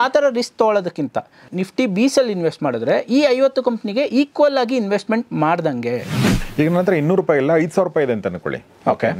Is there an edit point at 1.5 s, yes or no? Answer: yes